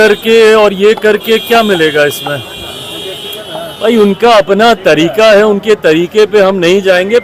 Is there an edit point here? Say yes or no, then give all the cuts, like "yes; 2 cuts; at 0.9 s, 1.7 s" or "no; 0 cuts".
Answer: no; 0 cuts